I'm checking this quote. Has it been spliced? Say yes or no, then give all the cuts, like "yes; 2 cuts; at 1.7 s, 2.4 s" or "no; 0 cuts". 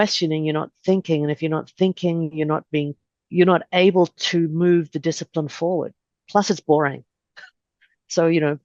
no; 0 cuts